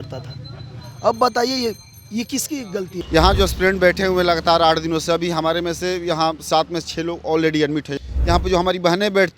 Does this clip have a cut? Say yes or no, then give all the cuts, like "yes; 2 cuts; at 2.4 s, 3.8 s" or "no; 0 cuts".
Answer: yes; 2 cuts; at 3.0 s, 8.0 s